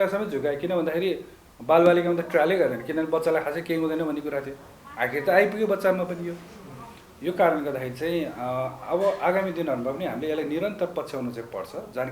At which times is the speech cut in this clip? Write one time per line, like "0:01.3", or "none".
none